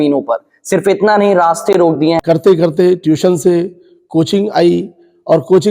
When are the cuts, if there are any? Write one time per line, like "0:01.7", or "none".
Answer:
0:02.2